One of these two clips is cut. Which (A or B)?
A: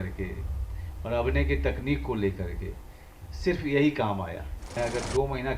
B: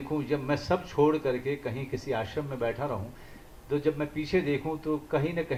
A